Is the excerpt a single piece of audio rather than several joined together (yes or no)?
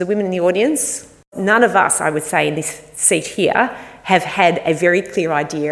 no